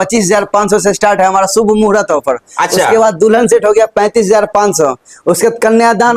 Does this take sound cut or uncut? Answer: uncut